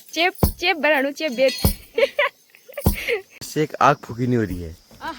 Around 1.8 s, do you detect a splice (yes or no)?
no